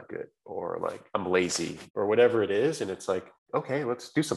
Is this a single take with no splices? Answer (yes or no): no